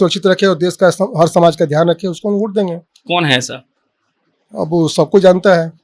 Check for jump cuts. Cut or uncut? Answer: uncut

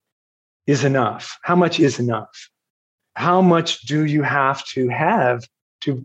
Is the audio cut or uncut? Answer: cut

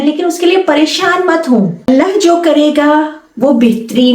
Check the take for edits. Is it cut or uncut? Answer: cut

